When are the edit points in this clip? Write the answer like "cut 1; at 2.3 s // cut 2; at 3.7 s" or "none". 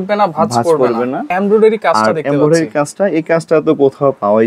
cut 1; at 1.3 s